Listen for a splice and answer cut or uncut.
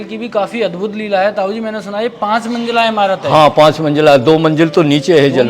uncut